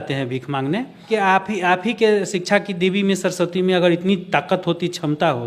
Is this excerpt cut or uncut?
uncut